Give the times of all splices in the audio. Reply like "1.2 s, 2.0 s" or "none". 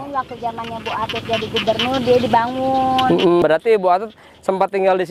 3.4 s